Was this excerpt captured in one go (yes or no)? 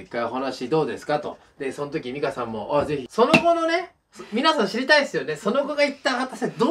no